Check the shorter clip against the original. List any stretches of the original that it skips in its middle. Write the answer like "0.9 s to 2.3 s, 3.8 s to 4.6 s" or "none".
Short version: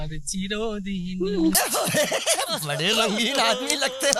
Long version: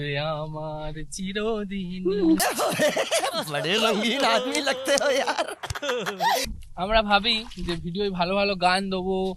none